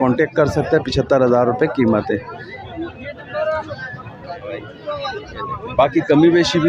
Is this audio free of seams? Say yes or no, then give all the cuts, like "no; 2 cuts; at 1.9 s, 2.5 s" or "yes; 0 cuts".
no; 1 cut; at 4.7 s